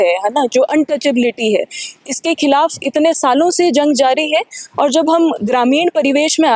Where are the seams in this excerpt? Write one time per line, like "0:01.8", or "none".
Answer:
none